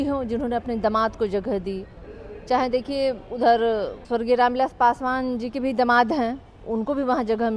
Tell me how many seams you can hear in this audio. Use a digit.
1